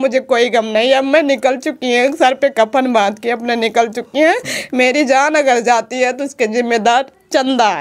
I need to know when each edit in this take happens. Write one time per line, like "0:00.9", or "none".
none